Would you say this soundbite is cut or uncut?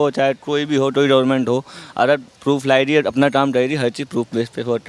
uncut